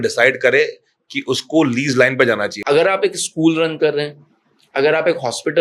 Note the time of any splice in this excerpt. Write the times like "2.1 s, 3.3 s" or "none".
2.5 s